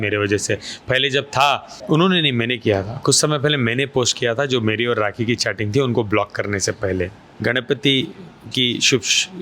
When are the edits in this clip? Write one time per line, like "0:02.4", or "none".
0:01.7
0:07.2